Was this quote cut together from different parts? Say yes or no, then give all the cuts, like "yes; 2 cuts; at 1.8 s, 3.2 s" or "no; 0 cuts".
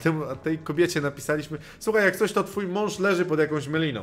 no; 0 cuts